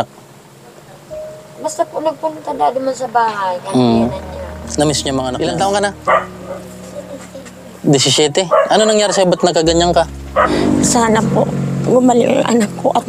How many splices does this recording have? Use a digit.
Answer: 2